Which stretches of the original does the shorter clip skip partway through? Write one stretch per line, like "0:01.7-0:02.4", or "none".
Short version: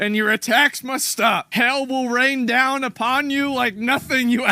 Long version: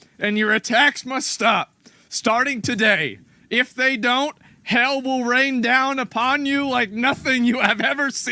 0:01.7-0:04.6